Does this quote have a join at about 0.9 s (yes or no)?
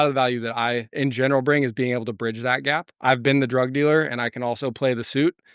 yes